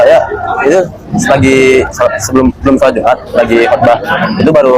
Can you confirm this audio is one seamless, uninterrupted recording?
yes; 0 cuts

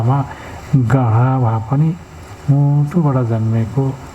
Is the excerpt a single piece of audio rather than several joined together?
no; 1 cut; at 2.3 s

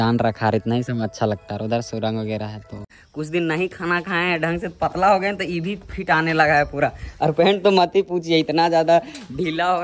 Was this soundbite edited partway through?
yes; 1 cut; at 3.0 s

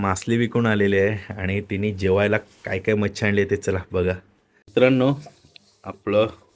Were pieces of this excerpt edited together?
yes; 1 cut; at 4.7 s

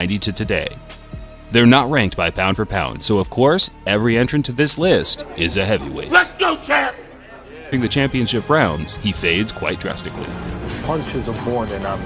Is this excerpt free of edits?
yes; 0 cuts

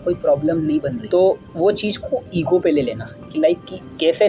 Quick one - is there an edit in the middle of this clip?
no; 0 cuts

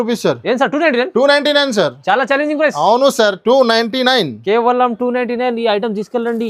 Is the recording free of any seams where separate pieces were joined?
yes; 0 cuts

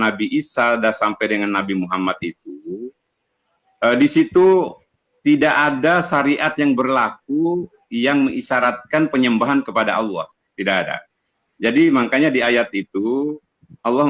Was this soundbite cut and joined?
no; 0 cuts

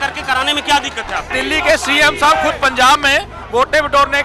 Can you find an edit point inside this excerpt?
yes; 1 cut; at 1.3 s

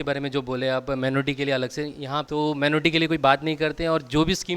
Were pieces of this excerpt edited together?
yes; 1 cut; at 2.2 s

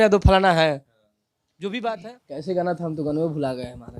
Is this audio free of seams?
no; 1 cut; at 2.1 s

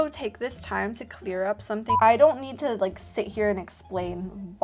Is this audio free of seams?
no; 1 cut; at 2.0 s

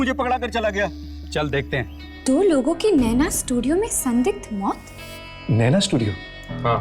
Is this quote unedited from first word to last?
no; 2 cuts; at 2.0 s, 5.4 s

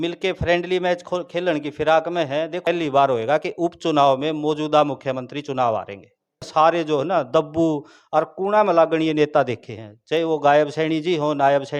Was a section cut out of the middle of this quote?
yes; 2 cuts; at 2.6 s, 6.5 s

